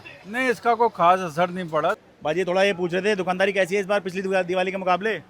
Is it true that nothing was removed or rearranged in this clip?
no; 1 cut; at 2.1 s

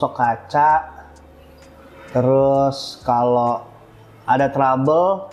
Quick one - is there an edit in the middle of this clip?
no; 0 cuts

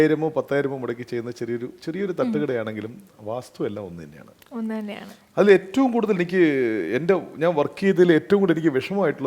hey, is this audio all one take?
yes; 0 cuts

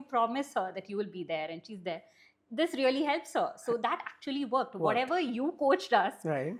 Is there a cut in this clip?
no; 0 cuts

